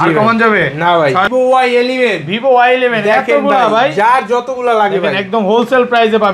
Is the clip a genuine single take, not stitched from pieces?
no; 1 cut; at 1.3 s

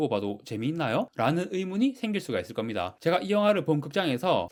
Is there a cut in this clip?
no; 0 cuts

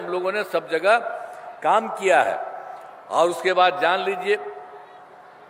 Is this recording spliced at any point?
no; 0 cuts

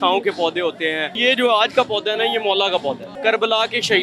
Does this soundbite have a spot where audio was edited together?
yes; 2 cuts; at 1.2 s, 3.1 s

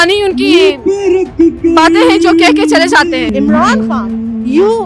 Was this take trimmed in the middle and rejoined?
yes; 1 cut; at 3.3 s

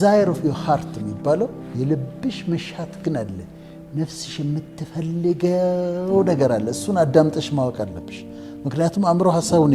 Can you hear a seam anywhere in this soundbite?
no; 0 cuts

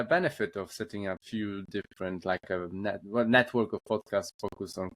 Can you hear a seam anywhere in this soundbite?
yes; 1 cut; at 1.2 s

